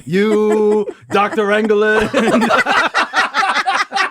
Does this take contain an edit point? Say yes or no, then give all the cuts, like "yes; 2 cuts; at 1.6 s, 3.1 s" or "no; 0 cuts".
no; 0 cuts